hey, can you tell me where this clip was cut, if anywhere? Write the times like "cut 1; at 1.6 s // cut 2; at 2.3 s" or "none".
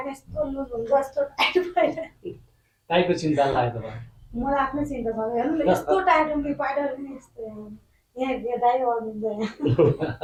none

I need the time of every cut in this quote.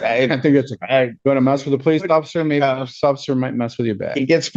cut 1; at 1.1 s

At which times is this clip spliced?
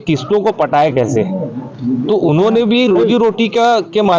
none

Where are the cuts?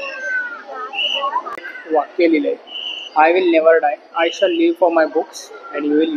cut 1; at 1.7 s

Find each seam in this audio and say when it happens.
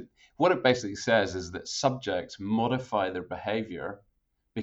none

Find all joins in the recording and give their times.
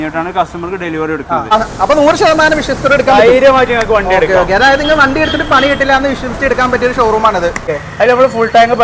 cut 1; at 1.5 s // cut 2; at 7.7 s

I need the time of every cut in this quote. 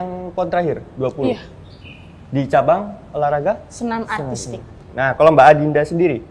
none

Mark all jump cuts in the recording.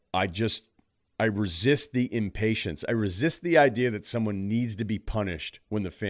none

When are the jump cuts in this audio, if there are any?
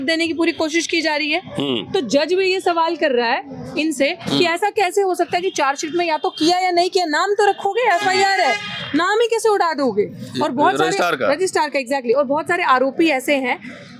none

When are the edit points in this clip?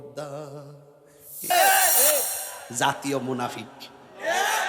cut 1; at 1.5 s

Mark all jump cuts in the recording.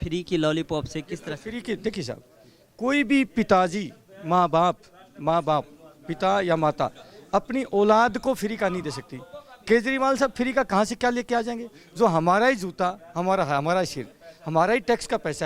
none

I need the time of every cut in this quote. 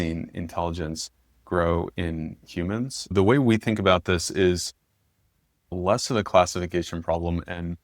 cut 1; at 3.1 s // cut 2; at 5.7 s

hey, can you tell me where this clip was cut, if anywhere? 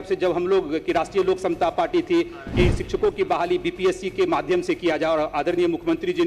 none

